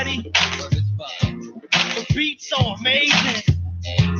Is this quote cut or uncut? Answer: uncut